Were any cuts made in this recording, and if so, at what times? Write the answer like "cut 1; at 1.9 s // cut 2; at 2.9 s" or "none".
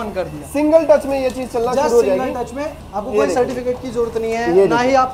none